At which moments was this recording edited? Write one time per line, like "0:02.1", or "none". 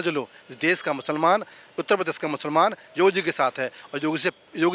none